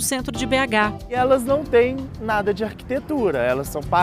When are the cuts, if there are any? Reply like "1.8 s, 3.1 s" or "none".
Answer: 1.2 s